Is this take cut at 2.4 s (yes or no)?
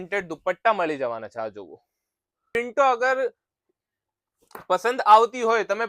yes